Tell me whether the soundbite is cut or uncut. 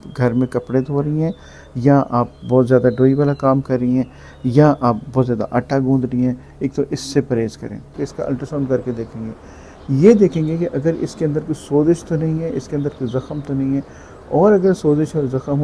cut